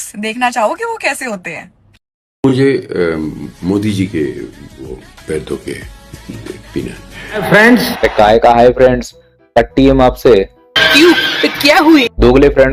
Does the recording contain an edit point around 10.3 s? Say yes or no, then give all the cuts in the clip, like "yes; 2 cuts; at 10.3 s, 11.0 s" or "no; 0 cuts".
no; 1 cut; at 7.4 s